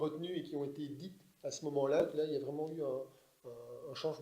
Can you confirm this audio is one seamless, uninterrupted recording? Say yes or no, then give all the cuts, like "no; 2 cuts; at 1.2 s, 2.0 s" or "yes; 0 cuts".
no; 1 cut; at 2.0 s